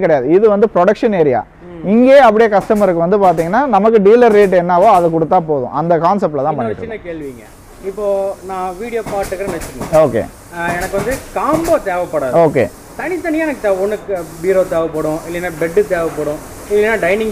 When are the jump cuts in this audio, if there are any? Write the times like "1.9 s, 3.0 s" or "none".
none